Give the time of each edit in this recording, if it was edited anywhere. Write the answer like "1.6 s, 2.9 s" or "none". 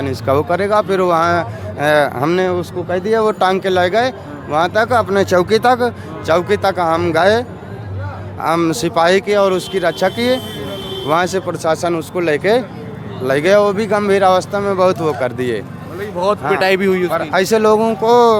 none